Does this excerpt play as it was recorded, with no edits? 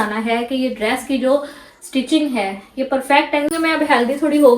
no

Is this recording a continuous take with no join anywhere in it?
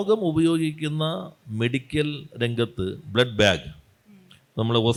yes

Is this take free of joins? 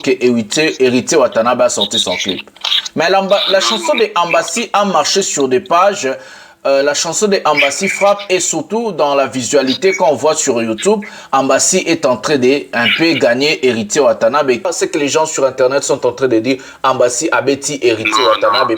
no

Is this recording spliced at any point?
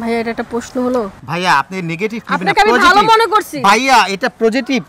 no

